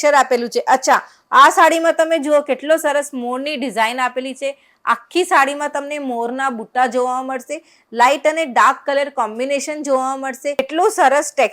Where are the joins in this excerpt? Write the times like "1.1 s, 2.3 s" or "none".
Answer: 10.6 s